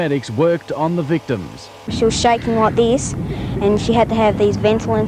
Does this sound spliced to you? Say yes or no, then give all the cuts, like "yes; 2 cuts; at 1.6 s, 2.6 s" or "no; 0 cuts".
yes; 1 cut; at 2.2 s